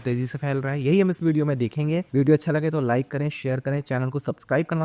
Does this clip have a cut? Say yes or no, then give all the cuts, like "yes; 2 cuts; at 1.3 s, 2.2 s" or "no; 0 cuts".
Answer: no; 0 cuts